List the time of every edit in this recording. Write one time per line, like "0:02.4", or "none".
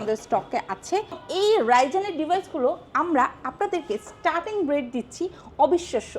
0:01.2

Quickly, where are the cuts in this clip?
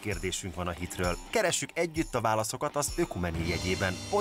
none

